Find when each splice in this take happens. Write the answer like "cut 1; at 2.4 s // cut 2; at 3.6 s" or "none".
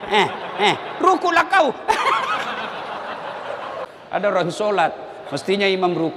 cut 1; at 3.9 s